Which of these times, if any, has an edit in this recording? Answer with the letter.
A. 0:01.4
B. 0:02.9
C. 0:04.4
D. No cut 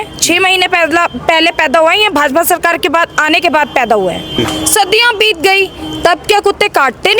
C